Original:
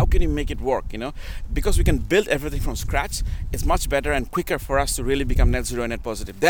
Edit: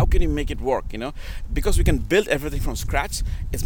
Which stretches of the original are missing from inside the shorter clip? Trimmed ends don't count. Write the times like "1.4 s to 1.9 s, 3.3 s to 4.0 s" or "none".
none